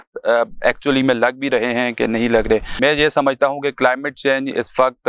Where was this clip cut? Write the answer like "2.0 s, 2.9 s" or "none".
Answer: 2.7 s